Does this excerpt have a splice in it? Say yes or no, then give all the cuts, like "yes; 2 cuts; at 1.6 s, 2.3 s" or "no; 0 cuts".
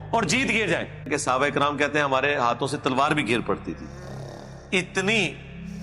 yes; 1 cut; at 1.1 s